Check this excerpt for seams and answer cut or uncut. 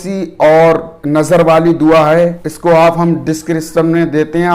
cut